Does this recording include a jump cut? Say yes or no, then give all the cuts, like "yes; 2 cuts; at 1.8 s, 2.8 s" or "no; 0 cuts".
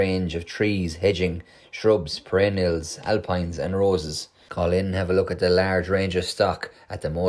no; 0 cuts